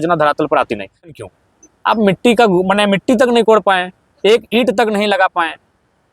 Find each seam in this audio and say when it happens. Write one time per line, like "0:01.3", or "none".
0:01.1